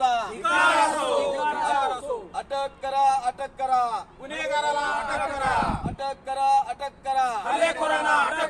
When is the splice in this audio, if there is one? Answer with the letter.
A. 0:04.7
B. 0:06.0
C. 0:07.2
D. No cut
B